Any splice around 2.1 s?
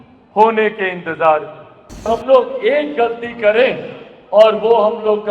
yes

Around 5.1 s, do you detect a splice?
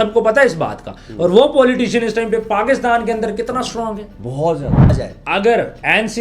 yes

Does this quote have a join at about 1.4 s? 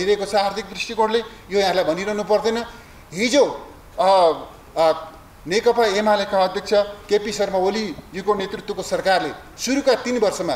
no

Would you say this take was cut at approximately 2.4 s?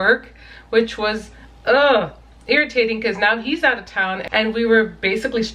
no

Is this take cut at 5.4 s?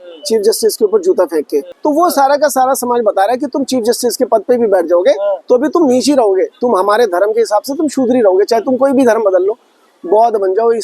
no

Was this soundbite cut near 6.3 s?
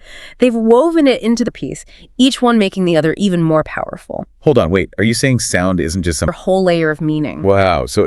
yes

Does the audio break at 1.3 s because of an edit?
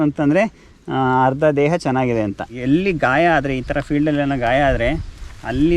no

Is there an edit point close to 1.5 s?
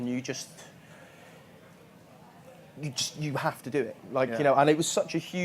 no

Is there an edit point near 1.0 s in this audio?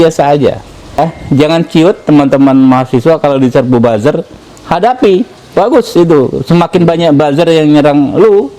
yes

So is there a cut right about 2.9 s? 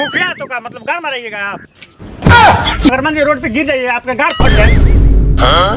yes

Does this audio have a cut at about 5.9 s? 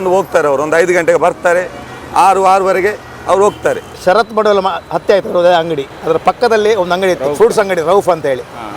no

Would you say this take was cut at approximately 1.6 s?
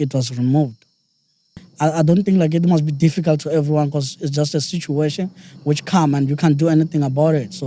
yes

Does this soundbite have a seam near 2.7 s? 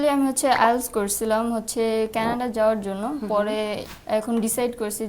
no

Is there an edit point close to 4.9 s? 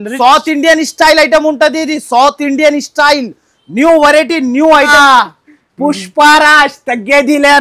yes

